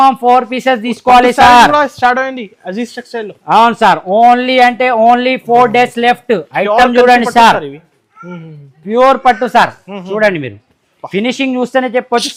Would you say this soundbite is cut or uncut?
uncut